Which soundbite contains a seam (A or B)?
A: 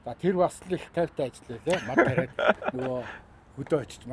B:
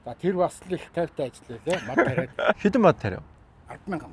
B